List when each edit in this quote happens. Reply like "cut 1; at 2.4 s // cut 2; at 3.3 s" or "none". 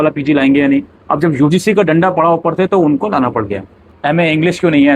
cut 1; at 3.9 s